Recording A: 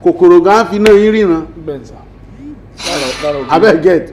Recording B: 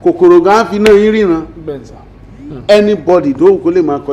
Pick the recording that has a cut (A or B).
B